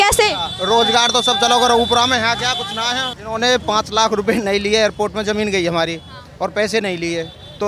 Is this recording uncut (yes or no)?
no